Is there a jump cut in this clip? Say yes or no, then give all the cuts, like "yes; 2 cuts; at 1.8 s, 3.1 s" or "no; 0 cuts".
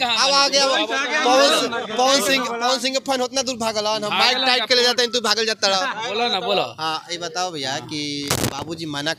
no; 0 cuts